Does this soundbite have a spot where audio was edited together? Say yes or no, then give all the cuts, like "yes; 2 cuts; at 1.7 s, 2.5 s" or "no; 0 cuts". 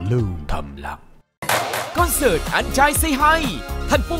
no; 0 cuts